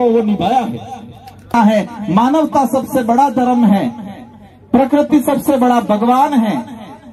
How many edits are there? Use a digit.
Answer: 1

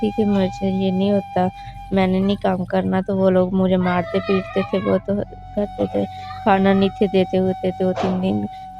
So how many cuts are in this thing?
0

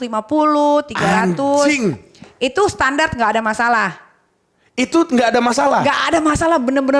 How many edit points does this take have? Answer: 0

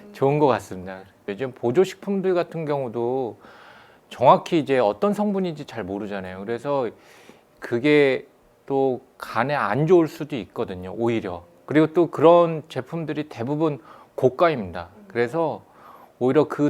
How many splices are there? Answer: 1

